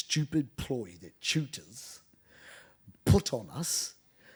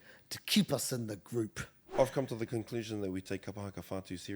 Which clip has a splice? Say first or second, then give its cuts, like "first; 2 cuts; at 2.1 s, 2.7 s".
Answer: second; 1 cut; at 1.9 s